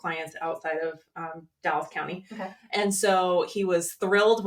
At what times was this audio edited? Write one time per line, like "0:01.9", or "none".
none